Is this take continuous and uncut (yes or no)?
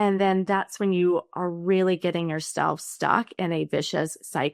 yes